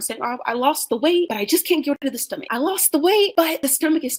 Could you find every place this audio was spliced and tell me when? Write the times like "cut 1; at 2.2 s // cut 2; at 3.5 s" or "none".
none